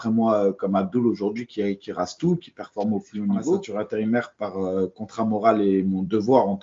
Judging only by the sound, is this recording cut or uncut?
cut